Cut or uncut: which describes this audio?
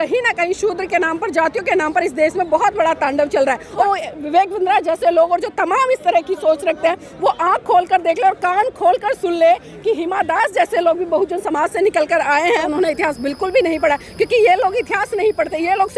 cut